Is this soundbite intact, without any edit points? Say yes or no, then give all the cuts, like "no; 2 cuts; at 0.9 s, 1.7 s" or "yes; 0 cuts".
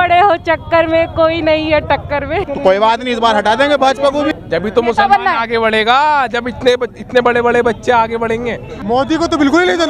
no; 3 cuts; at 2.4 s, 4.3 s, 8.8 s